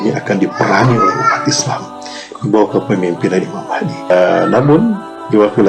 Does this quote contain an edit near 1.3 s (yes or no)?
no